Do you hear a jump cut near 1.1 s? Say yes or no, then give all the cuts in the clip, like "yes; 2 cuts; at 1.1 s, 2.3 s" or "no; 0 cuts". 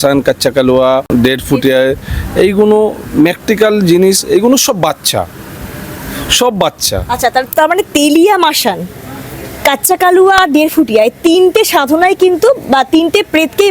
yes; 1 cut; at 1.1 s